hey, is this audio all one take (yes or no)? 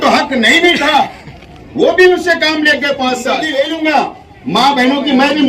no